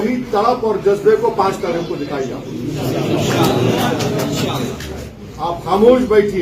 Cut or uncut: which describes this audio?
cut